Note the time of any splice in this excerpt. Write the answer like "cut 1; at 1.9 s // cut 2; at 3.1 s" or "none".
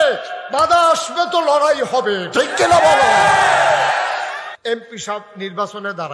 cut 1; at 4.5 s